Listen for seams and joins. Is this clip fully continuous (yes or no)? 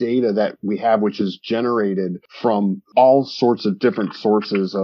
no